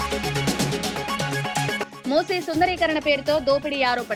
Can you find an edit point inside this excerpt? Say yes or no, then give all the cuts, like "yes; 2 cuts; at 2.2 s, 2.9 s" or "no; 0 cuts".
no; 0 cuts